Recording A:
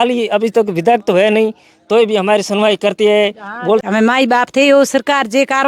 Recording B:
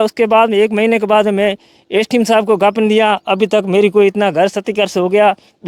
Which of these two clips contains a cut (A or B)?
A